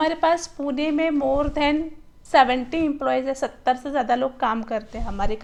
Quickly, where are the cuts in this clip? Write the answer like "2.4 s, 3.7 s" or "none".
none